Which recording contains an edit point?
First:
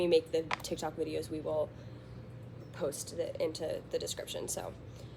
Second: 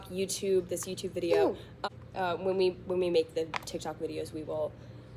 second; 1 cut; at 1.7 s

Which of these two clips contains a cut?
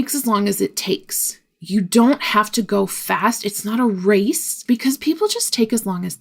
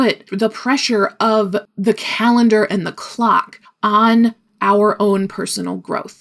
first; 1 cut; at 4.5 s

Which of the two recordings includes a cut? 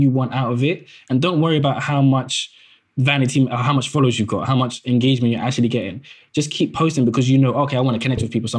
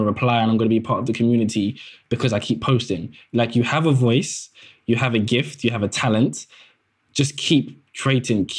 second; 1 cut; at 2.0 s

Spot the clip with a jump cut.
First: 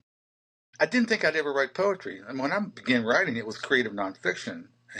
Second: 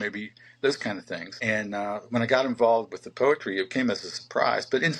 second; 1 cut; at 1.3 s

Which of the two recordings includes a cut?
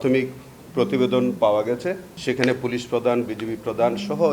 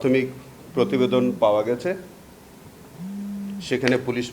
first; 1 cut; at 2.1 s

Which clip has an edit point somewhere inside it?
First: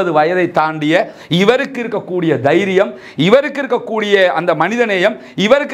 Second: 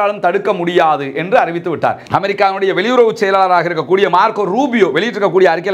second; 1 cut; at 2.0 s

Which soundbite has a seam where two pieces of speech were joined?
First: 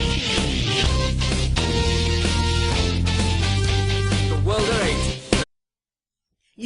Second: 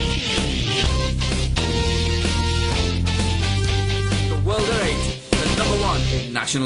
second; 1 cut; at 5.4 s

